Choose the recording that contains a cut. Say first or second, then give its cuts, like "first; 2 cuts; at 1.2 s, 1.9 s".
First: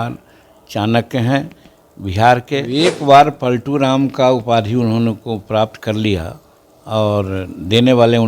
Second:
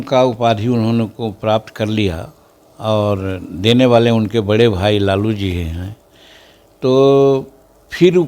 first; 1 cut; at 2.7 s